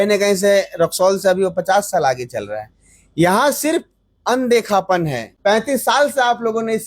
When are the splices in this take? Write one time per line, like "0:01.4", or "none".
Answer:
0:05.2